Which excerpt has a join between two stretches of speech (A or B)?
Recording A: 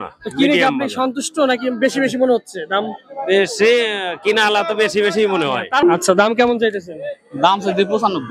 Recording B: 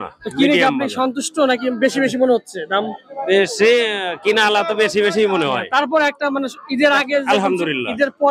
A